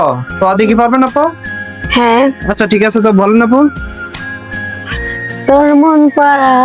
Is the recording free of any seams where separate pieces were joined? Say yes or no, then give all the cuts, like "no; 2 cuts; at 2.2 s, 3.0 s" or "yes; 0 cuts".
no; 1 cut; at 1.9 s